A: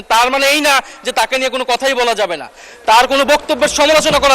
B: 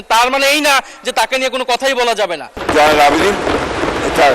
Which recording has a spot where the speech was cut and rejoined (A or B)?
B